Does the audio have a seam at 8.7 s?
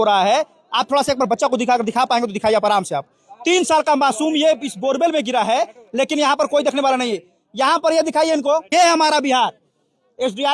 yes; 1 cut; at 8.7 s

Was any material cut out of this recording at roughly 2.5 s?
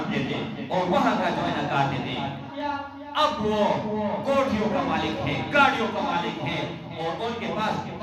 yes; 1 cut; at 2.5 s

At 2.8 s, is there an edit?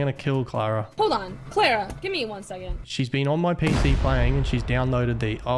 yes; 1 cut; at 2.8 s

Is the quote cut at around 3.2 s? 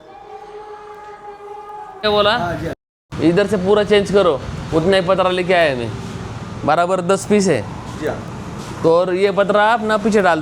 no; 1 cut; at 2.0 s

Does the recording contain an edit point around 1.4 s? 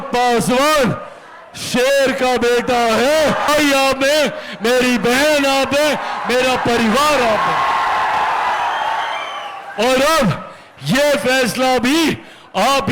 no; 1 cut; at 3.5 s

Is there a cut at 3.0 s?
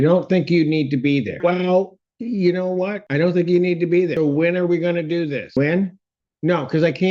yes; 4 cuts; at 1.3 s, 3.0 s, 4.1 s, 5.6 s

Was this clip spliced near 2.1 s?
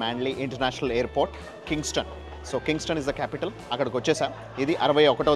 no; 0 cuts

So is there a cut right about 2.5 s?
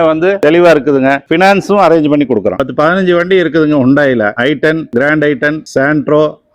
yes; 1 cut; at 2.5 s

